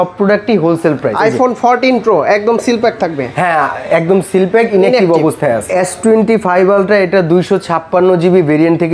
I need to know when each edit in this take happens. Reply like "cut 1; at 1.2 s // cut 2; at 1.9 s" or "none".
cut 1; at 1.1 s // cut 2; at 5.6 s